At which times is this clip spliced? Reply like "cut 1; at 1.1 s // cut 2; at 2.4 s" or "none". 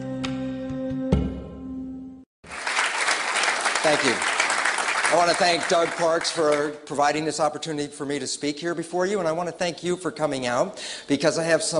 cut 1; at 1.0 s